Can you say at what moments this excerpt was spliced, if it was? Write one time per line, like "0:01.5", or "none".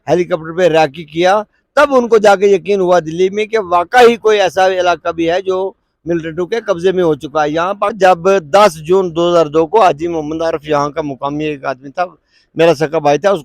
0:08.0